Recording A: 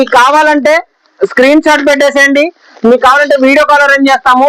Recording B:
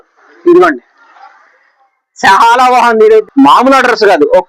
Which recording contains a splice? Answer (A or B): B